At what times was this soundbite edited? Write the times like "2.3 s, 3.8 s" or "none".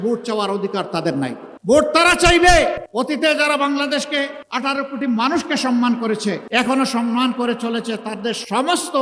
1.5 s, 2.8 s, 4.4 s, 6.4 s